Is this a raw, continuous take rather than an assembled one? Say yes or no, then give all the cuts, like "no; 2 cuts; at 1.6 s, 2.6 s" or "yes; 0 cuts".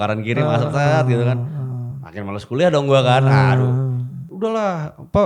no; 1 cut; at 4.2 s